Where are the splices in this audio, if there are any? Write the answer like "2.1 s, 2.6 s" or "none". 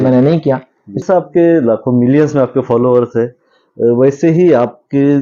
1.0 s